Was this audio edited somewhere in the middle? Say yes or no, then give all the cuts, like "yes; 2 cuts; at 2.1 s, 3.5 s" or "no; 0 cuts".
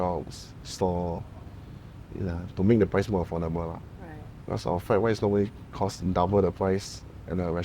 no; 0 cuts